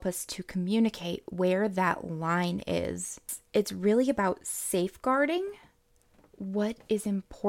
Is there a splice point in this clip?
yes; 1 cut; at 3.3 s

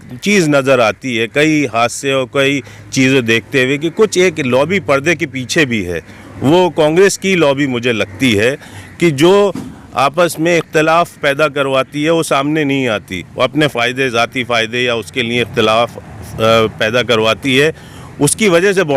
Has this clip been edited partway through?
no; 0 cuts

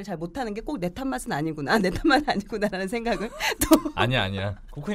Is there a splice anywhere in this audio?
no; 0 cuts

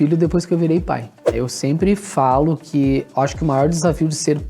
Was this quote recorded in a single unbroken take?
no; 1 cut; at 1.2 s

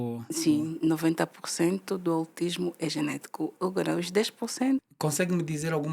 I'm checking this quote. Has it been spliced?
yes; 1 cut; at 4.9 s

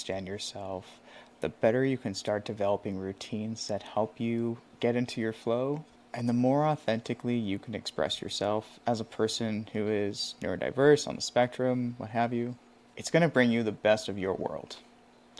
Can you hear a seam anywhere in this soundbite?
no; 0 cuts

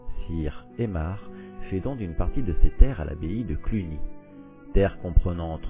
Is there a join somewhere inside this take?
yes; 1 cut; at 2.4 s

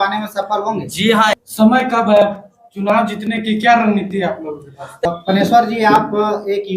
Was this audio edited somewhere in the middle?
yes; 2 cuts; at 1.3 s, 5.1 s

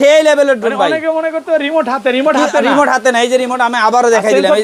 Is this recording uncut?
yes; 0 cuts

